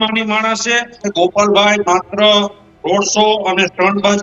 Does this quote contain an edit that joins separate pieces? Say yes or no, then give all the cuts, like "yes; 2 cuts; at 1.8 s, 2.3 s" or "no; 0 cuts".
yes; 1 cut; at 1.0 s